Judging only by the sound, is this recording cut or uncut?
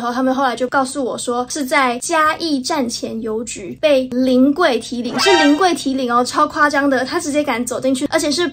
uncut